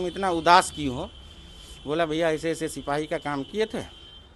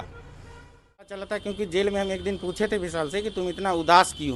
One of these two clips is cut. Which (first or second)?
second